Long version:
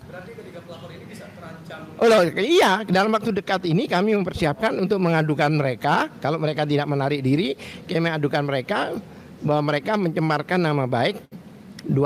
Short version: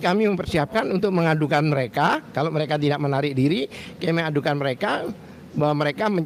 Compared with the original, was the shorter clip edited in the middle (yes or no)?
no